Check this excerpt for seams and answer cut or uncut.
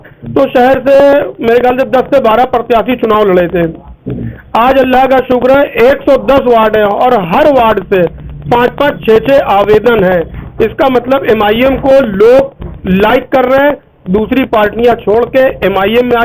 uncut